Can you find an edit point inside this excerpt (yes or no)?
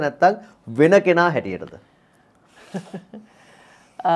no